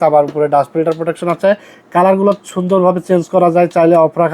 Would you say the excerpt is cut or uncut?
uncut